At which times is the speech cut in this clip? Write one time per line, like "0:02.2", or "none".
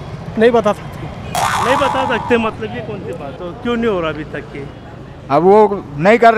0:03.3